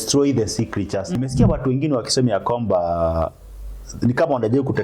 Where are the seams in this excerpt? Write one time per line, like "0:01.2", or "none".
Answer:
0:01.1